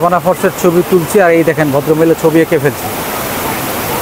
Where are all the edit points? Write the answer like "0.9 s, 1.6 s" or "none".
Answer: none